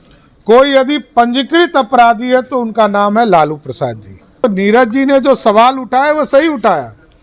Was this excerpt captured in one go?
no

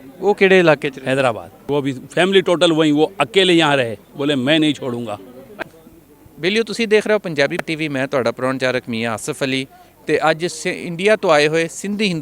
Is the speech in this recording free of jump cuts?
no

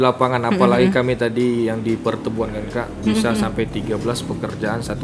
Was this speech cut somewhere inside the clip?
no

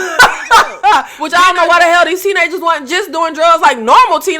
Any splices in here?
yes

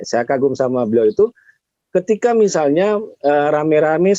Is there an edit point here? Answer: no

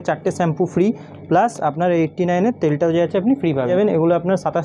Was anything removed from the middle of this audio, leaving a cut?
yes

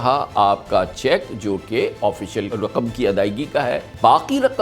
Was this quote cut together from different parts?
no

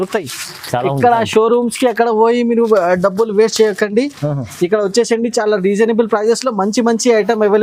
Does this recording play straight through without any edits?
yes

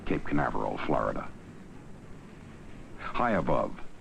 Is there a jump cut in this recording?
yes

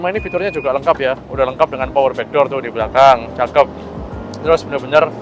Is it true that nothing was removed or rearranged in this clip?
yes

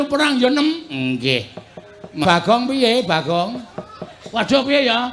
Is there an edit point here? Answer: yes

